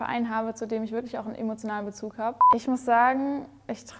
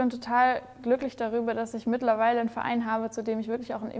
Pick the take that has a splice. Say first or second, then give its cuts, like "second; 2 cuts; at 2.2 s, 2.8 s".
first; 1 cut; at 2.4 s